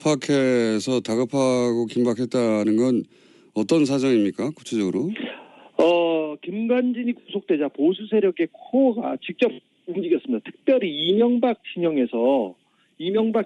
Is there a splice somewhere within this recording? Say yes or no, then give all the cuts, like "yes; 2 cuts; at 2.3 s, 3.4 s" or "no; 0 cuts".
yes; 1 cut; at 8.6 s